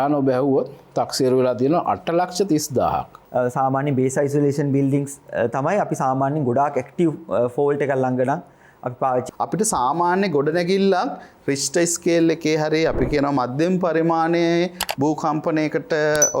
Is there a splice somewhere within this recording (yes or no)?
yes